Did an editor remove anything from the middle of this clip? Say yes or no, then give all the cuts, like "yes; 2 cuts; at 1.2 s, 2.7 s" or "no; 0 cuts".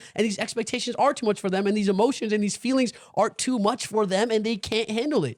no; 0 cuts